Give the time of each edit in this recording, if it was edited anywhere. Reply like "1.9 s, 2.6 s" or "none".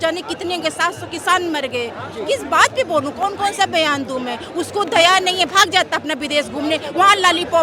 none